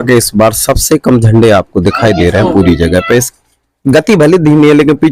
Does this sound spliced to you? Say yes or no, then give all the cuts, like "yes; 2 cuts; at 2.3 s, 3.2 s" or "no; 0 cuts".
yes; 1 cut; at 3.3 s